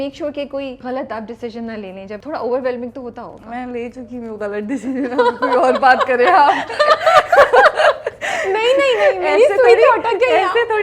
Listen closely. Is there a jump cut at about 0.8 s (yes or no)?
yes